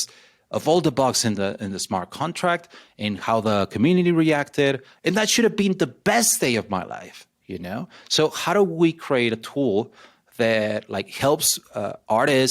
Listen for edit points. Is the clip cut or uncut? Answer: cut